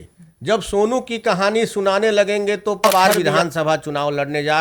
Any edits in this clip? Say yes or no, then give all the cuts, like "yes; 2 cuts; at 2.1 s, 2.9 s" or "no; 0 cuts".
yes; 1 cut; at 2.8 s